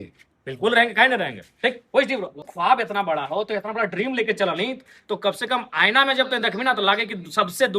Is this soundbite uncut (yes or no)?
no